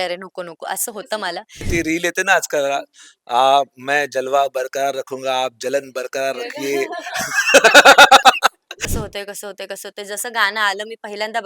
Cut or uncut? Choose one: cut